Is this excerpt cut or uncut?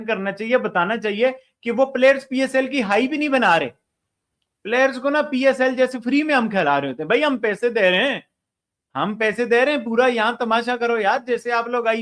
uncut